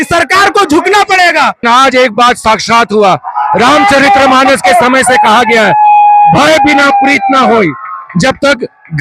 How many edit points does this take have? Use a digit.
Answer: 1